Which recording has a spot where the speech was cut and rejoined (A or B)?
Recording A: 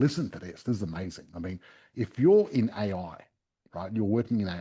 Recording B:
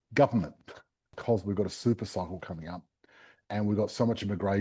B